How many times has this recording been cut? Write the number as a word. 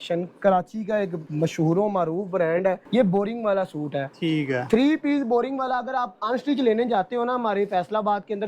two